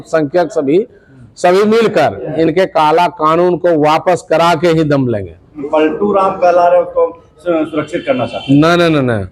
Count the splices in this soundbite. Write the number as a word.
one